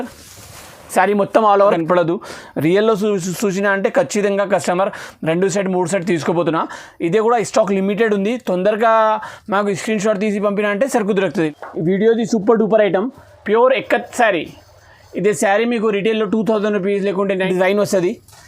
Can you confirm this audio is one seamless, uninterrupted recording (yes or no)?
no